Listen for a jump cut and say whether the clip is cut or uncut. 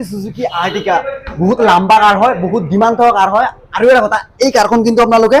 uncut